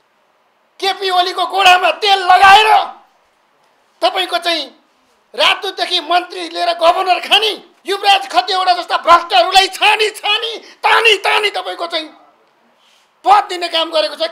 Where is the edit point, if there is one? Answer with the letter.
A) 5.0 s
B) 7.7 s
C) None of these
B